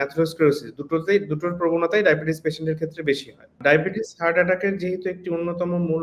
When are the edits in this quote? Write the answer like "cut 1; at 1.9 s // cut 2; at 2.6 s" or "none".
cut 1; at 3.5 s